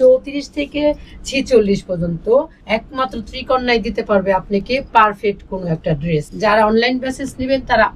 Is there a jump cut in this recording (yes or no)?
yes